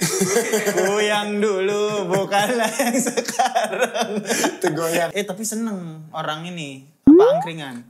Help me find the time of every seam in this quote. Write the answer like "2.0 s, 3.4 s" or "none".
5.1 s

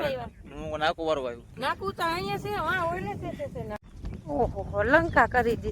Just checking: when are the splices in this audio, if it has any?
1.5 s, 3.8 s

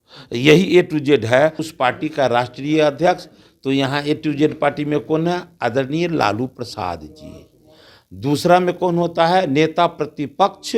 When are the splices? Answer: 1.7 s

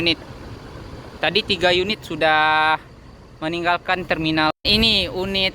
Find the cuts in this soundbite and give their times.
4.5 s

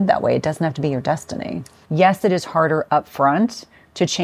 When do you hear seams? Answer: 1.7 s

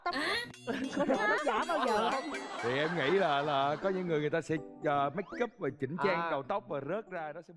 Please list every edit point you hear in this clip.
none

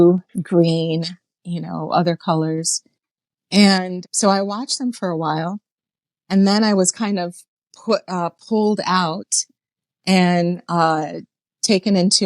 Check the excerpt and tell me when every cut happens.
4.0 s

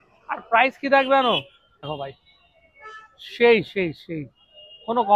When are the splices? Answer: 1.9 s

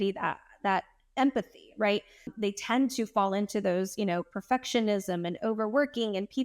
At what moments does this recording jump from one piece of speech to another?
2.3 s

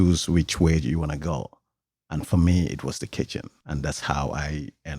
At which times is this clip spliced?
3.5 s

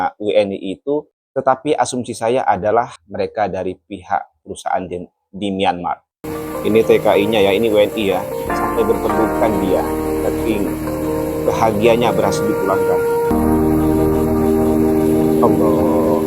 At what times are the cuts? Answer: 1.2 s, 3.0 s, 6.2 s, 13.3 s

